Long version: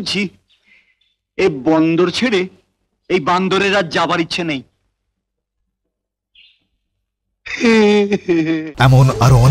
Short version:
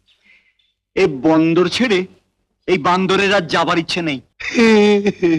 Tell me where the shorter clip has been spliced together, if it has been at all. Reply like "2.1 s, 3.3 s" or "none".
4.3 s